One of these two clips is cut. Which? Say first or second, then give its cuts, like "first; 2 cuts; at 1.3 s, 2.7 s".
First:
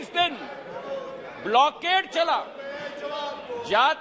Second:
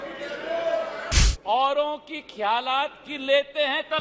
second; 1 cut; at 1.2 s